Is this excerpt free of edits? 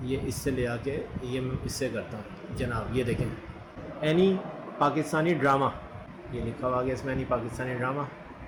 yes; 0 cuts

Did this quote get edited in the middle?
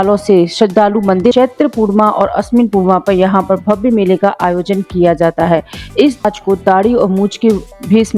yes; 2 cuts; at 1.3 s, 6.2 s

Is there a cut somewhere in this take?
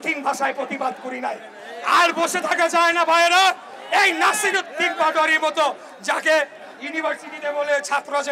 no; 0 cuts

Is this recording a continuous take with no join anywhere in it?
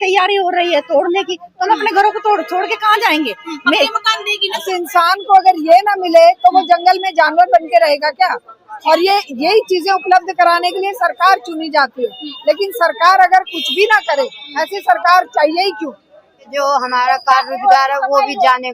no; 2 cuts; at 4.6 s, 16.4 s

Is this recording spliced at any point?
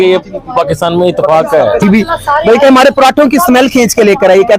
yes; 1 cut; at 1.8 s

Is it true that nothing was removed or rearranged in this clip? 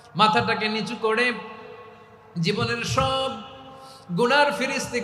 yes; 0 cuts

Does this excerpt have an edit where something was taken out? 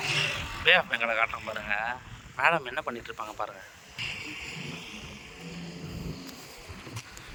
no; 0 cuts

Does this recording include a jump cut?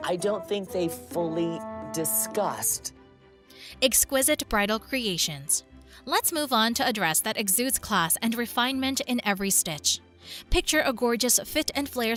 no; 0 cuts

